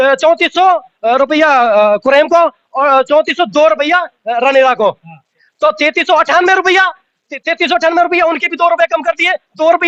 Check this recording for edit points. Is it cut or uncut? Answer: uncut